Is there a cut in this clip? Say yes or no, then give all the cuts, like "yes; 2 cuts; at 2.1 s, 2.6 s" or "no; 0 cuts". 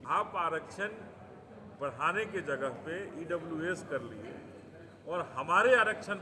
no; 0 cuts